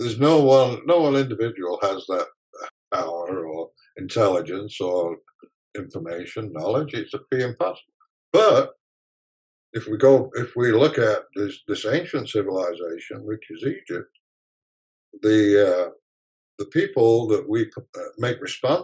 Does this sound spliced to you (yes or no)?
yes